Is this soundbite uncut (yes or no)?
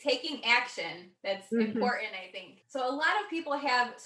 no